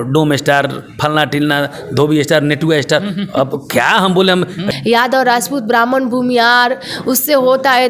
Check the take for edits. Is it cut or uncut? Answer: cut